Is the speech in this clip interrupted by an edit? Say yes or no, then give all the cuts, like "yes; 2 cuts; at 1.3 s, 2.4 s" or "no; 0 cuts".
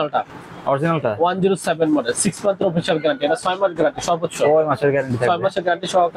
no; 0 cuts